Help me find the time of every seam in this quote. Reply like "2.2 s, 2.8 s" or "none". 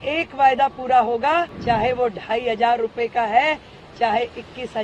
1.5 s